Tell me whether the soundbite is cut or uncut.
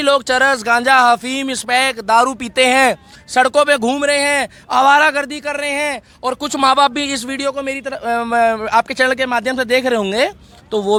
uncut